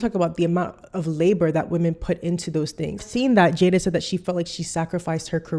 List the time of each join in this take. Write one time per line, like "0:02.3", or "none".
0:03.0